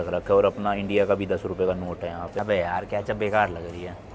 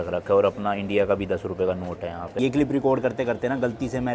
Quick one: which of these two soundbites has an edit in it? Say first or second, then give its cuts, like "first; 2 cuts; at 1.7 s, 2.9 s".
second; 1 cut; at 2.4 s